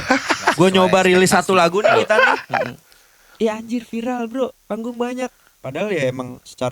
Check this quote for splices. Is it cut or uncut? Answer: uncut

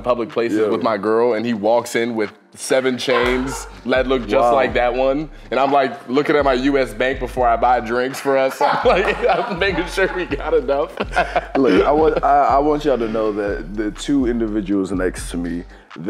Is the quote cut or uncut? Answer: uncut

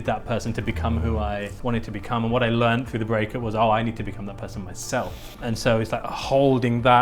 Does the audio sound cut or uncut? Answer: cut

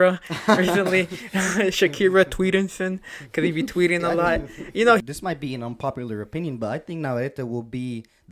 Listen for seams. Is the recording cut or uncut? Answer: cut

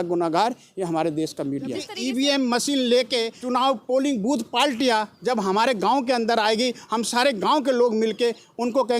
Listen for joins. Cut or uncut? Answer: cut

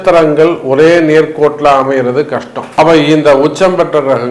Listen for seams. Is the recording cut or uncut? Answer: cut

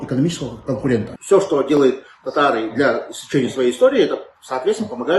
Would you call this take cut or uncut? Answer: cut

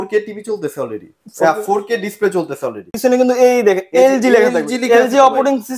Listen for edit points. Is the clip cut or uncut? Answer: cut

